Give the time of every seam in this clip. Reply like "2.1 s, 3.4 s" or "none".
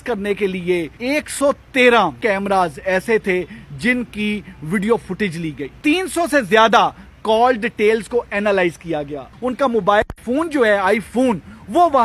0.9 s, 2.2 s, 5.7 s, 9.3 s

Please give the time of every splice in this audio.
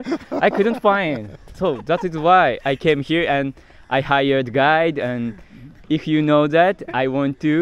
1.4 s

